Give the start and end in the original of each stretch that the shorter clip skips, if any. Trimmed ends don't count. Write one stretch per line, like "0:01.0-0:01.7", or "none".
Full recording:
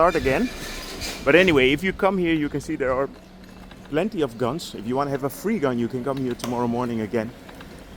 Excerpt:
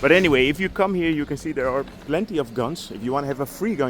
0:03.2-0:03.8

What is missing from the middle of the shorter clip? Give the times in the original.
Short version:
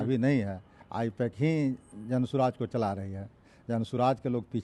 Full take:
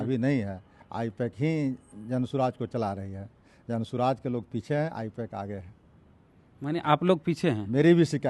none

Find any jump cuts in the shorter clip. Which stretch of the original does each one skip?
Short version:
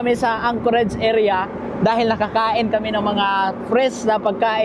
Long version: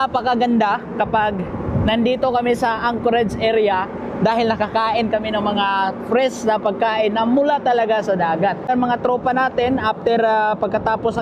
none

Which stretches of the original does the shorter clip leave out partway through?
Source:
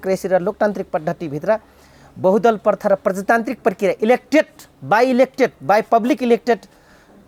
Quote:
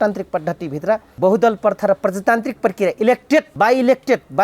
0:01.7-0:02.1
0:04.5-0:04.8

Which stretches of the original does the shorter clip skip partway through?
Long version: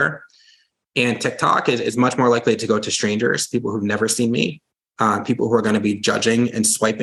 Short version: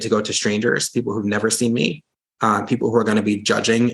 none

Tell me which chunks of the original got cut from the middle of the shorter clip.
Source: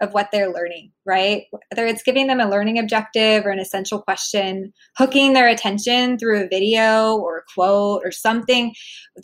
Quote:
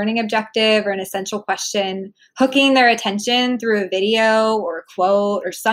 none

